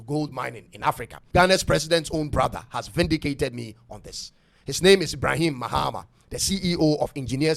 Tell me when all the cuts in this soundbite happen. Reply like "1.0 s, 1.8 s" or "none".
none

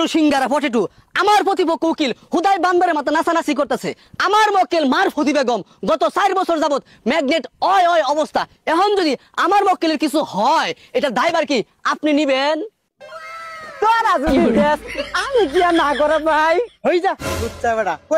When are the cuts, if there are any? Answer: none

